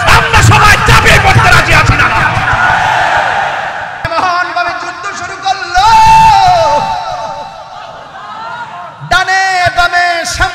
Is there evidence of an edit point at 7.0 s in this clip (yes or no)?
no